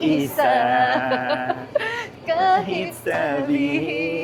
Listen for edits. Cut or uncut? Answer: uncut